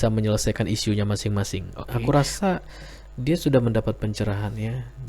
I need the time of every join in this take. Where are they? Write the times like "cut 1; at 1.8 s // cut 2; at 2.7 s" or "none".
cut 1; at 1.8 s